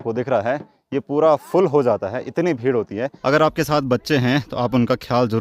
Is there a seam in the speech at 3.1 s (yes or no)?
yes